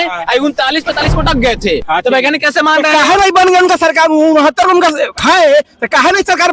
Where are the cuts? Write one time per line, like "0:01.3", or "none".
none